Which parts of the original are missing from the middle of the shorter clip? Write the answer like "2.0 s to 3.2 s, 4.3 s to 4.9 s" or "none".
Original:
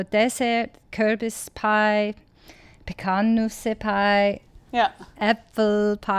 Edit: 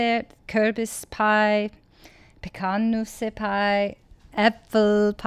4.6 s to 5.0 s